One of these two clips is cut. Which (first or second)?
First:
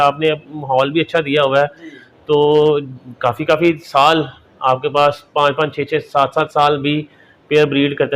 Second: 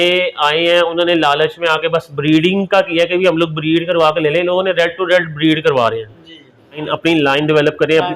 second